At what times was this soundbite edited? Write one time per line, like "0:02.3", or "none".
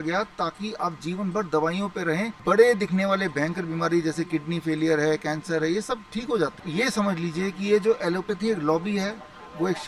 0:02.3
0:06.7